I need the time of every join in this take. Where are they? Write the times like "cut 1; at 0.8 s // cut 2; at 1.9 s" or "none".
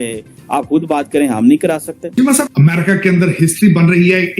cut 1; at 2.3 s